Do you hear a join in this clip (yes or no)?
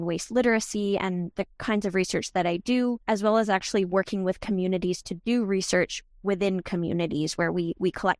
no